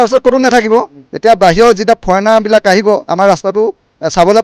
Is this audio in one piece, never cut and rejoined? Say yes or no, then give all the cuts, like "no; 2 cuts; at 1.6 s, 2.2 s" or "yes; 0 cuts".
yes; 0 cuts